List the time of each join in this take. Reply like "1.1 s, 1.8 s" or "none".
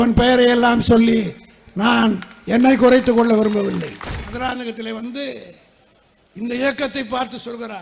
4.3 s